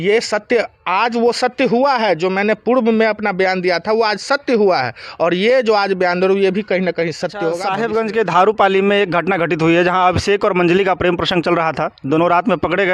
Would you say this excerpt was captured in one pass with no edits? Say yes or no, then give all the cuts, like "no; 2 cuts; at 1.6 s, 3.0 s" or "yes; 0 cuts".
no; 1 cut; at 7.7 s